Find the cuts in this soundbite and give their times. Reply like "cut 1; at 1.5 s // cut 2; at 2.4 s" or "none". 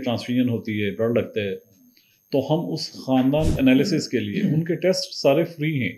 cut 1; at 3.5 s